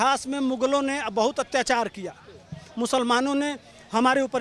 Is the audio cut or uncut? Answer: uncut